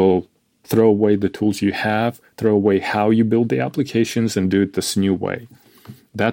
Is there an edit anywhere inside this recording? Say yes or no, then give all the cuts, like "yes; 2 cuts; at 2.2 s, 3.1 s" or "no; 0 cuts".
no; 0 cuts